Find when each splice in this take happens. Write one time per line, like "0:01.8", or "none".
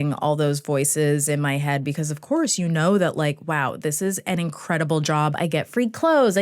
0:05.4